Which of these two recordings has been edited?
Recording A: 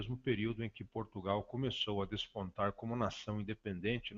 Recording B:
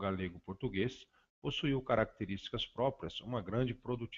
B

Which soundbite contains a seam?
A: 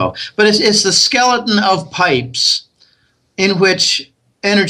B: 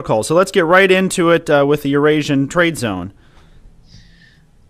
B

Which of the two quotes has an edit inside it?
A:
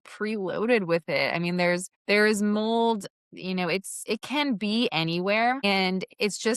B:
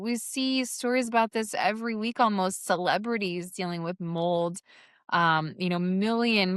A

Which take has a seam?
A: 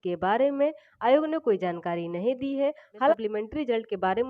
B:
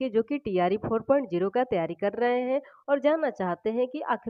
A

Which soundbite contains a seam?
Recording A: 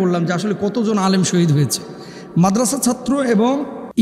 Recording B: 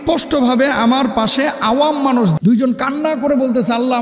B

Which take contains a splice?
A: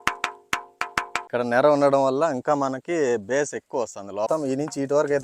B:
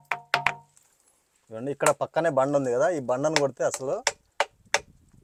A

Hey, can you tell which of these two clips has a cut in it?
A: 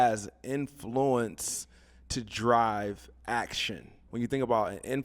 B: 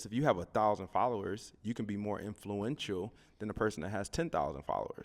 A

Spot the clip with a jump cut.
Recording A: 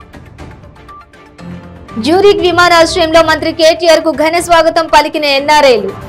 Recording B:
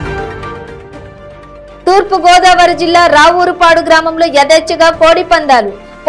A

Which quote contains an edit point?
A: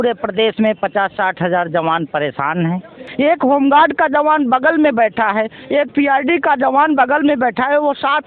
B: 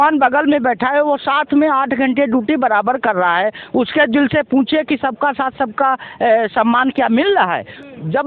A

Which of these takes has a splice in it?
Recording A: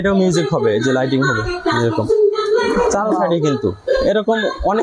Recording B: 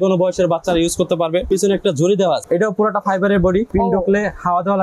B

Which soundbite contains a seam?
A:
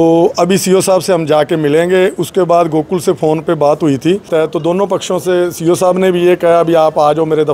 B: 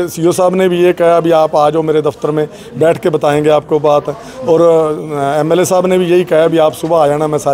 A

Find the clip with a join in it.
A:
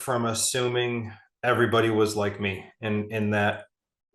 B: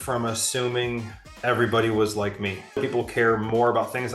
B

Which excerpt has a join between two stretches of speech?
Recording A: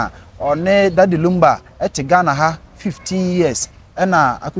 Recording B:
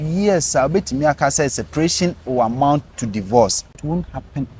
B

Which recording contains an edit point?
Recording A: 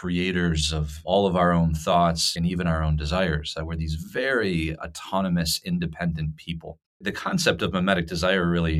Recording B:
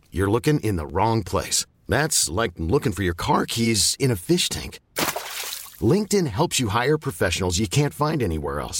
A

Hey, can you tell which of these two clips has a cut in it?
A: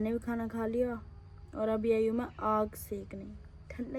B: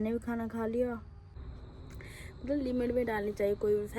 B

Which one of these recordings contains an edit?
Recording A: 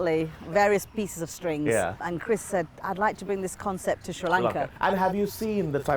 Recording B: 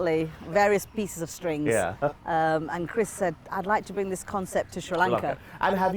A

